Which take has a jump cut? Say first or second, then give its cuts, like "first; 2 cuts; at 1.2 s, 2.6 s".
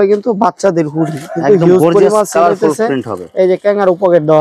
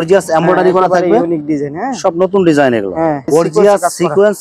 second; 1 cut; at 3.2 s